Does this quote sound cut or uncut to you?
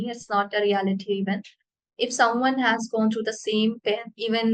uncut